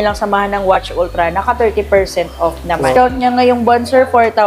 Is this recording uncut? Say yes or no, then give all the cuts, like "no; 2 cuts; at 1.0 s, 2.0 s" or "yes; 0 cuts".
no; 1 cut; at 2.9 s